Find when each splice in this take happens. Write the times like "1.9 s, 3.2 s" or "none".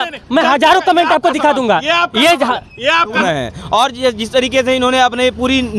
3.2 s